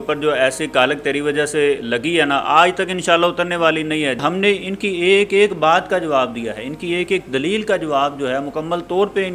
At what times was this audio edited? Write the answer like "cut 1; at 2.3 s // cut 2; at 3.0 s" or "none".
cut 1; at 4.2 s